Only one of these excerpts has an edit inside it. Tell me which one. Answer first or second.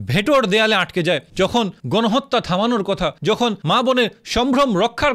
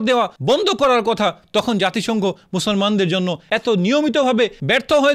first